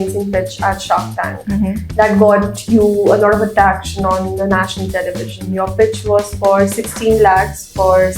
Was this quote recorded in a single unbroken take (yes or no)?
yes